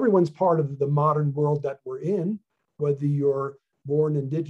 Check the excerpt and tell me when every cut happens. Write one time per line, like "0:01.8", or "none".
none

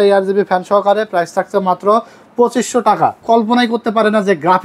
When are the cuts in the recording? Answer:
0:03.2

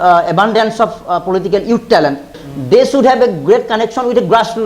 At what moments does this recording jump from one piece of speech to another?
0:02.4

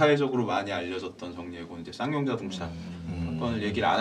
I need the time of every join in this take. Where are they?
none

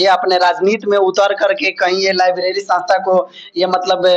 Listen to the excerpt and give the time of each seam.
none

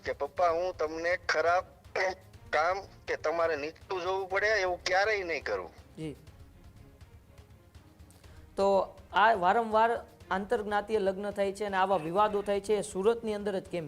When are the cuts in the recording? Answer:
none

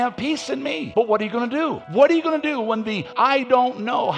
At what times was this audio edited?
0:00.9
0:01.8
0:03.0

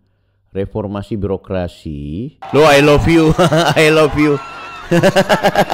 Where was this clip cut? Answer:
0:02.4

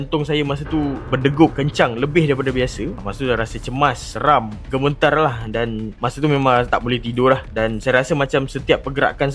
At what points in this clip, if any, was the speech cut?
none

